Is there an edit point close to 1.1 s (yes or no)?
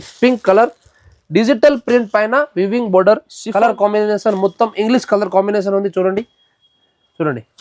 no